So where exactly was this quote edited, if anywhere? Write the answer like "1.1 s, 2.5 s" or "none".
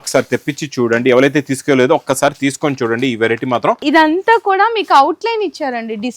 3.8 s